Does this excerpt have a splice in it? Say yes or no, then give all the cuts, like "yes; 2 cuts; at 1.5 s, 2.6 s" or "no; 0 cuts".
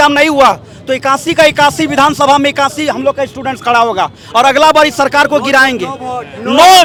no; 0 cuts